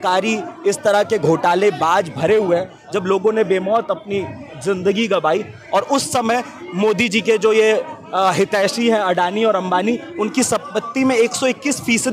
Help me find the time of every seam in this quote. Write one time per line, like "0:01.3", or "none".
0:02.8